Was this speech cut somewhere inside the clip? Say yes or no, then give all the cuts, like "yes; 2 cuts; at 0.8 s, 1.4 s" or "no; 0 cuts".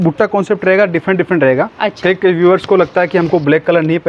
no; 0 cuts